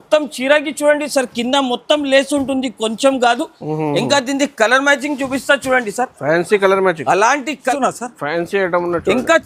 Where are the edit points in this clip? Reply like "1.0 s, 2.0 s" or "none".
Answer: 7.6 s